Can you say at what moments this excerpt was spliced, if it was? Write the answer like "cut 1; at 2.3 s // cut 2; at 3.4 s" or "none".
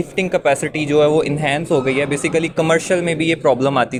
none